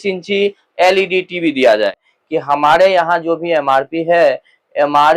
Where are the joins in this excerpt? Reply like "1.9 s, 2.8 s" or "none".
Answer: 2.1 s